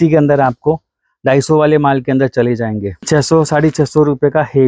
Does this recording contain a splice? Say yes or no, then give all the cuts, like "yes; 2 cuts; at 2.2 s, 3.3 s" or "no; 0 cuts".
yes; 1 cut; at 3.0 s